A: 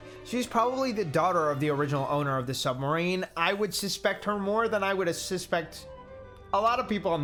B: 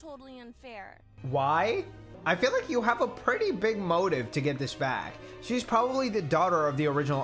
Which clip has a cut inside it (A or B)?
B